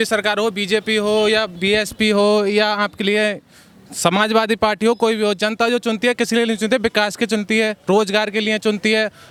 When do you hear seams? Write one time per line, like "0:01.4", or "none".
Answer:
none